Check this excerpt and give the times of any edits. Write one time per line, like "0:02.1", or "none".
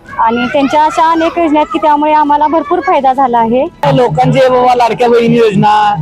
0:03.8